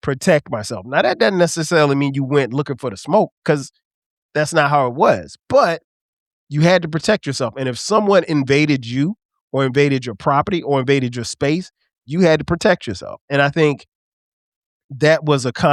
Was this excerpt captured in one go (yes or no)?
yes